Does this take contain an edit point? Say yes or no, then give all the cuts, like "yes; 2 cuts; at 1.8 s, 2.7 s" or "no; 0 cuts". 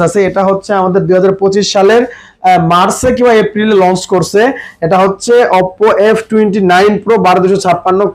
no; 0 cuts